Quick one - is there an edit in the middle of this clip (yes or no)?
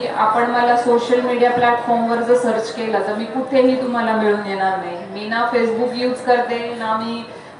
no